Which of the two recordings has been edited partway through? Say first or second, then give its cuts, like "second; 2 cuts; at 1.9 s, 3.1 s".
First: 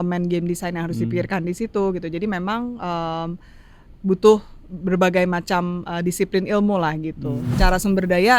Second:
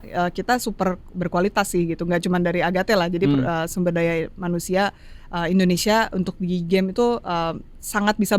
first; 1 cut; at 7.5 s